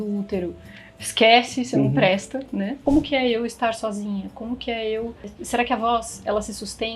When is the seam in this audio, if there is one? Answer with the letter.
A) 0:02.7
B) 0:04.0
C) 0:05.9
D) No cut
A